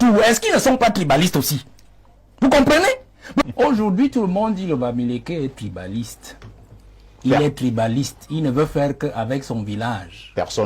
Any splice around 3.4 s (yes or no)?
yes